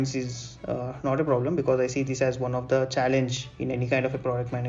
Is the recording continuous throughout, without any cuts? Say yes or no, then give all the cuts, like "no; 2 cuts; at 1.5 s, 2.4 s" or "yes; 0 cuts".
yes; 0 cuts